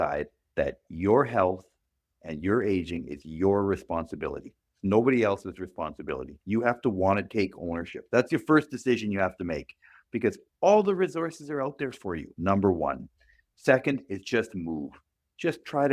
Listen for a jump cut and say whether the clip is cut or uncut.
cut